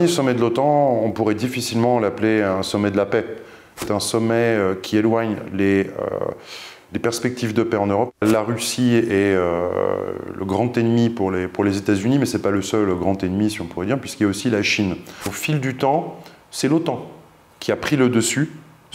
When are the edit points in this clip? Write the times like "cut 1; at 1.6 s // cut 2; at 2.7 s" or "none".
cut 1; at 3.8 s // cut 2; at 8.2 s // cut 3; at 15.4 s